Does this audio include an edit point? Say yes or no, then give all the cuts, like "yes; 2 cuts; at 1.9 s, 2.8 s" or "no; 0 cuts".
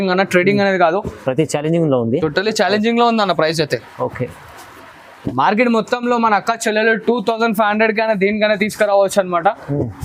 no; 0 cuts